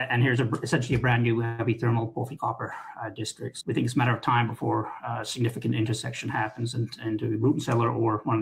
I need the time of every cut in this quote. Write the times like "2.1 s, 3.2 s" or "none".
3.5 s